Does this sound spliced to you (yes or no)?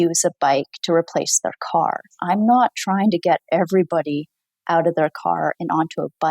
yes